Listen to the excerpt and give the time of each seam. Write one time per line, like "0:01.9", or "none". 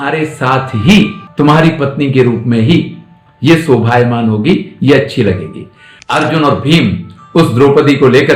0:06.0

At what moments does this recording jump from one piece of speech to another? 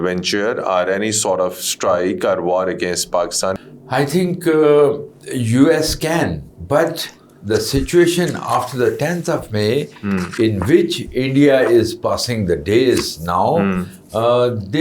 0:03.6

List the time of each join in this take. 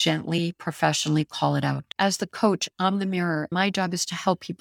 0:01.9
0:03.5

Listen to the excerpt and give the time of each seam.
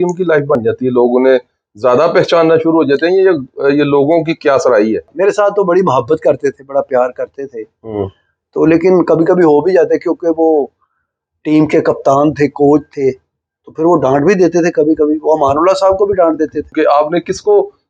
0:05.1
0:16.7

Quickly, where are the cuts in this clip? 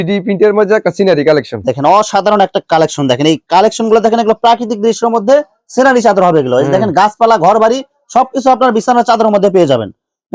none

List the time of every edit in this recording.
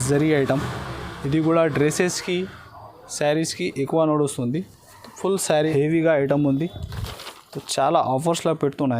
0:05.7

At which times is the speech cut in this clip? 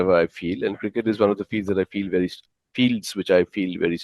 none

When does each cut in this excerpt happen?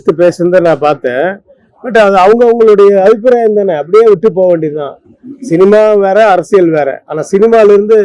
none

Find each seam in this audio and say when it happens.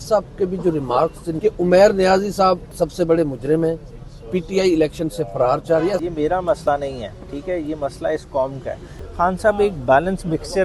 0:01.3
0:02.7
0:06.0
0:09.0

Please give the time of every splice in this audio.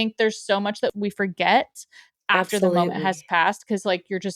0:00.9

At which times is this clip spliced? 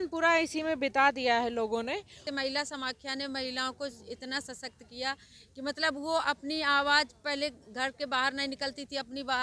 0:02.3

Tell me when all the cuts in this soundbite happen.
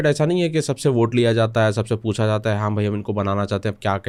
none

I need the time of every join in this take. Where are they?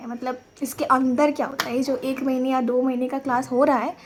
none

